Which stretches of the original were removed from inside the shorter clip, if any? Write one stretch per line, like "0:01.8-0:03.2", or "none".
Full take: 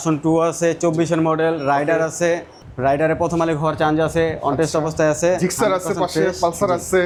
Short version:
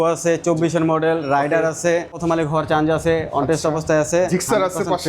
0:02.6-0:03.3